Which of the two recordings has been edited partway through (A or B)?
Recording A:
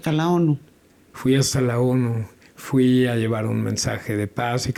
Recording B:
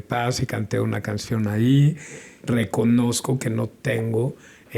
B